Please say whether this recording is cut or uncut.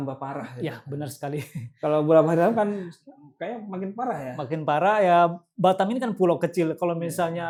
uncut